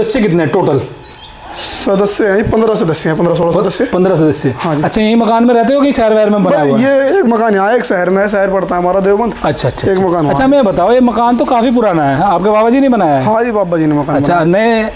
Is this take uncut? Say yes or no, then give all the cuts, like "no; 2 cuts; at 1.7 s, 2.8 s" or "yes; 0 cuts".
yes; 0 cuts